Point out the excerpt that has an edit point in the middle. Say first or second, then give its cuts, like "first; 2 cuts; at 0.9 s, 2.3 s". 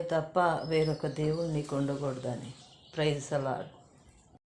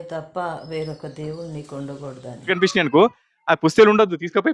second; 1 cut; at 2.5 s